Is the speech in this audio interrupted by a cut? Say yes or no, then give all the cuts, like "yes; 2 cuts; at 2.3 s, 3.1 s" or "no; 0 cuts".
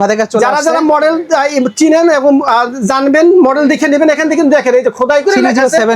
no; 0 cuts